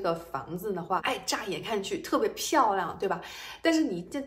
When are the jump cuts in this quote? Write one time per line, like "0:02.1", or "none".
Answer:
0:01.0